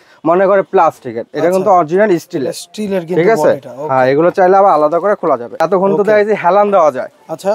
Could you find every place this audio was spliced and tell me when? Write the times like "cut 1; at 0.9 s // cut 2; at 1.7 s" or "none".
cut 1; at 5.6 s